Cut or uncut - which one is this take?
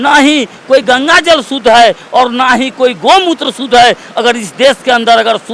uncut